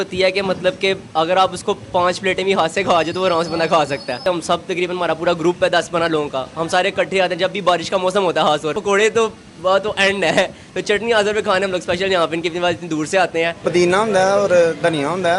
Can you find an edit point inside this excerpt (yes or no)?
yes